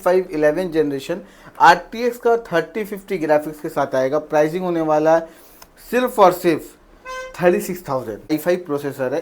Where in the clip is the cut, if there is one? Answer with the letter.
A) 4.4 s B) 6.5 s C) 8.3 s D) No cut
C